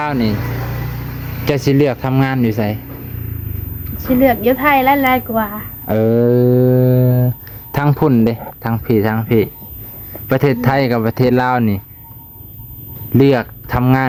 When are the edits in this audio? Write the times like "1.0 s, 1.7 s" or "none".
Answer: none